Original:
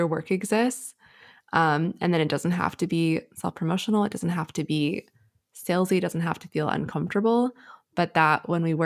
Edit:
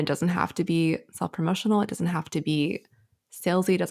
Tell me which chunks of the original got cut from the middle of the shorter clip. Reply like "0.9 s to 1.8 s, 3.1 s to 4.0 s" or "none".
none